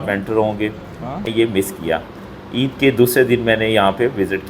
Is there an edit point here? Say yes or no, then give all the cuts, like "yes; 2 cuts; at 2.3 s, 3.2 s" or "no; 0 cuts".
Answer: yes; 1 cut; at 1.2 s